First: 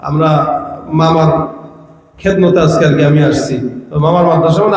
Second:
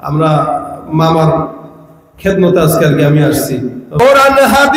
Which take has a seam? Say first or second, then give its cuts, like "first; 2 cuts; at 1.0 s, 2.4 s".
second; 1 cut; at 3.8 s